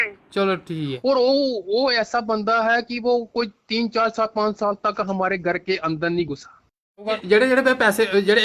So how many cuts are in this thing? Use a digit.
2